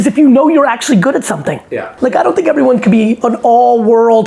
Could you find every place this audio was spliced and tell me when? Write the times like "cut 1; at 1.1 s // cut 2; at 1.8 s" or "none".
cut 1; at 1.9 s // cut 2; at 3.2 s